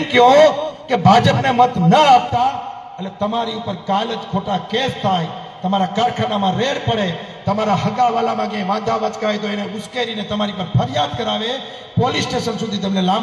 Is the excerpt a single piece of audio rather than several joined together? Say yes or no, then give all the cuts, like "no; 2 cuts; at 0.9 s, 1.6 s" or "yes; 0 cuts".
yes; 0 cuts